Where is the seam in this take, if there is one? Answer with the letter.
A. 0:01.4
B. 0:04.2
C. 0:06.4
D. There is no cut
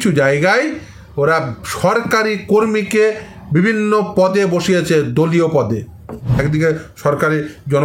C